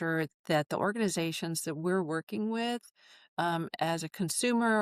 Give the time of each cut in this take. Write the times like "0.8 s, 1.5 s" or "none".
none